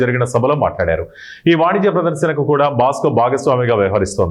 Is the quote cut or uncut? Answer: uncut